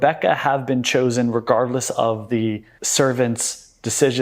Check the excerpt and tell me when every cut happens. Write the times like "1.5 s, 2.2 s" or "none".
2.7 s